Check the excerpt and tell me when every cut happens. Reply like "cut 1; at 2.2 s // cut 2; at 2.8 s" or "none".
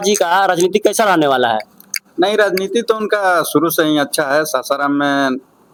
none